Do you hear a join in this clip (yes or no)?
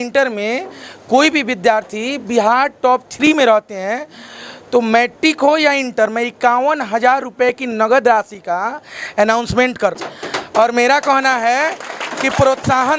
no